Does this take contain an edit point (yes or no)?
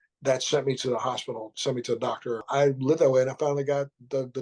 yes